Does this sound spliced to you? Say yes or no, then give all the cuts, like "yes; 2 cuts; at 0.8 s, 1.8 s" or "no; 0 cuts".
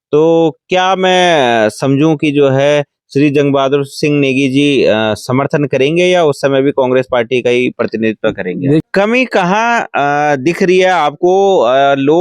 yes; 1 cut; at 8.9 s